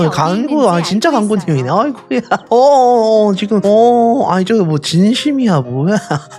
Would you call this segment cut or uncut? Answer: uncut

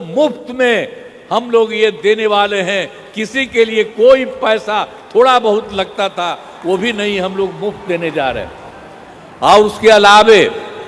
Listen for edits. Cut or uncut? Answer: uncut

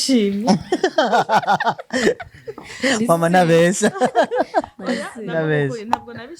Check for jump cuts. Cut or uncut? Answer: uncut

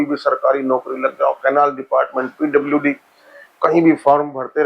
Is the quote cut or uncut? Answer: uncut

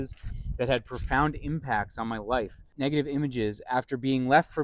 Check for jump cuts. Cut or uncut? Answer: cut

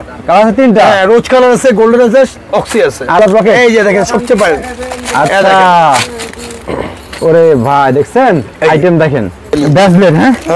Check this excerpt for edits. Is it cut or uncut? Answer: cut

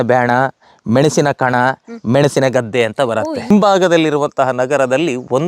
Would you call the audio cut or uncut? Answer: cut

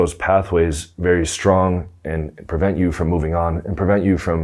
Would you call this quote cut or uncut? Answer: uncut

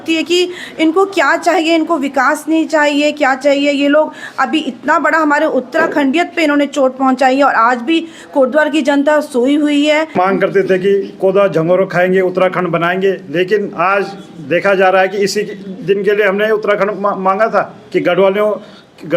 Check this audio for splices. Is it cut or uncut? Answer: cut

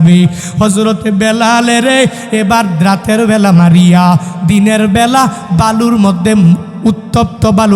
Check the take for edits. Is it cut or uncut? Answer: uncut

